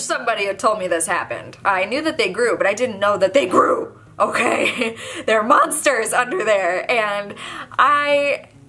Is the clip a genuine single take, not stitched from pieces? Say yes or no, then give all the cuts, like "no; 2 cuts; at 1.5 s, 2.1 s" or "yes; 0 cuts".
yes; 0 cuts